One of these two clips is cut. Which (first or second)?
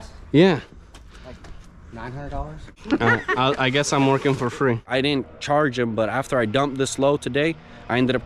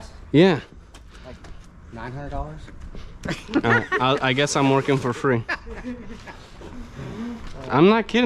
first